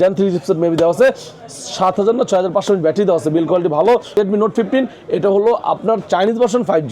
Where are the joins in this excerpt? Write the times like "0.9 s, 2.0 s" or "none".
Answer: 4.1 s